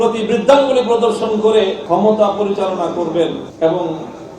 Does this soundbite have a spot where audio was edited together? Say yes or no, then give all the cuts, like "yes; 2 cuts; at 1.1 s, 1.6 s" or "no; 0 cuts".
yes; 2 cuts; at 1.8 s, 3.5 s